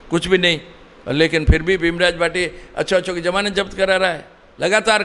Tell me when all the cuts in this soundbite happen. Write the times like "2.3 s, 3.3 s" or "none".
none